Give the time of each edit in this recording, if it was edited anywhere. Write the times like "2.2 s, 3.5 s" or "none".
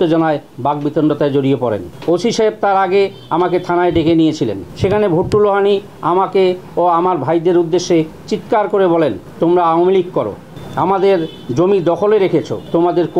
none